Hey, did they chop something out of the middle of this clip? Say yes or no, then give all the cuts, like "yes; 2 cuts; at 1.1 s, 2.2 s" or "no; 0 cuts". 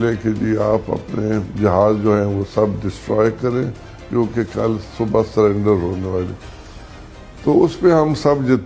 no; 0 cuts